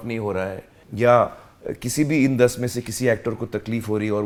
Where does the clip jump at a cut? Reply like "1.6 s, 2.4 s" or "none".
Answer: none